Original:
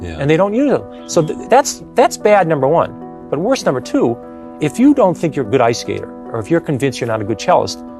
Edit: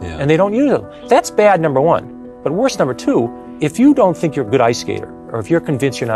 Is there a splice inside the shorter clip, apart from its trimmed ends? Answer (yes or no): yes